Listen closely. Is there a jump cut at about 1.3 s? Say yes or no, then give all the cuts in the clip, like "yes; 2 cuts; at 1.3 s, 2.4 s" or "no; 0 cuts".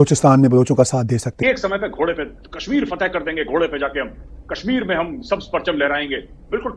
yes; 1 cut; at 1.3 s